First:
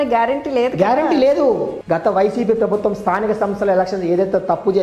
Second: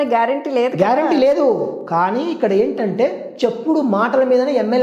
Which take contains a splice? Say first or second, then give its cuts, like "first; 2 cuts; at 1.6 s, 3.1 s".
first; 1 cut; at 1.7 s